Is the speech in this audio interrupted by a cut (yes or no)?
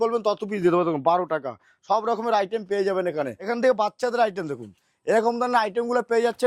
yes